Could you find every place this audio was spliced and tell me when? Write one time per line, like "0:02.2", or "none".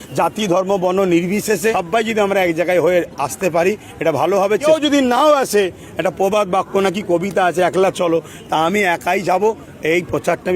0:01.7
0:04.6